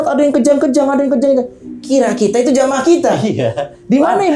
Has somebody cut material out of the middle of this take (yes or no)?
no